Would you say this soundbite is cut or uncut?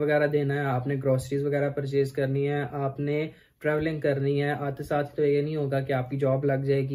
uncut